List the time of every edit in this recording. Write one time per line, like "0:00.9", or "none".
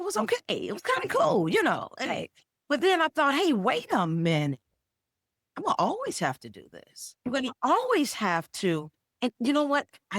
0:07.3